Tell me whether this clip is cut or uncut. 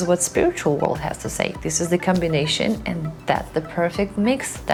uncut